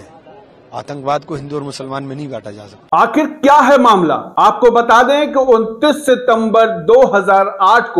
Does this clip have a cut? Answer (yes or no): no